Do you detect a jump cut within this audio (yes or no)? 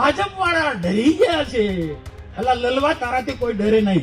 no